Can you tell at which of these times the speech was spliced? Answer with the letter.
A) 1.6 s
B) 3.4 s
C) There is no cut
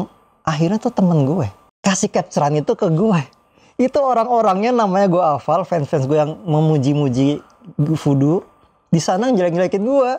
A